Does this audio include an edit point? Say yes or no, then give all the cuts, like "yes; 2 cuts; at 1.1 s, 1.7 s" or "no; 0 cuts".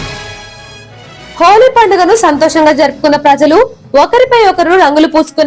no; 0 cuts